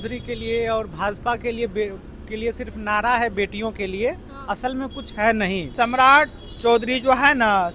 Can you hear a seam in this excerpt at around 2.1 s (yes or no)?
no